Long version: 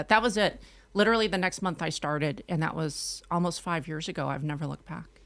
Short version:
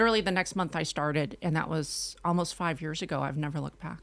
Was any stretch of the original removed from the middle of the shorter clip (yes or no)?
no